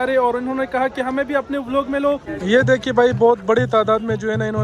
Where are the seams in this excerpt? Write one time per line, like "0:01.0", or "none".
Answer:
0:02.3